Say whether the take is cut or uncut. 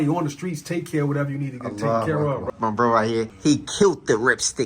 cut